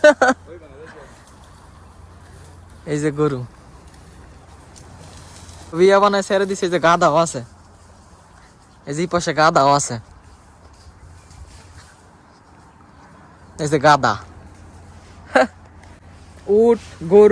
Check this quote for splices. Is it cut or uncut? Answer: cut